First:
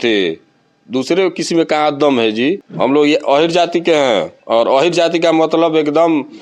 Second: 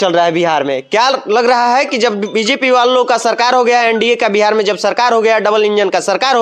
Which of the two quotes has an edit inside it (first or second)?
first